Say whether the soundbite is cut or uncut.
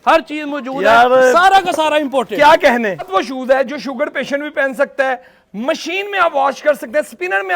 cut